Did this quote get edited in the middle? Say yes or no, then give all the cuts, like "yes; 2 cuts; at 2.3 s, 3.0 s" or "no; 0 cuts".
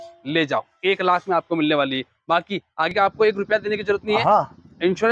yes; 1 cut; at 2.9 s